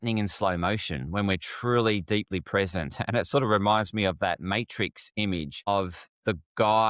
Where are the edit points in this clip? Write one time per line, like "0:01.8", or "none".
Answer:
none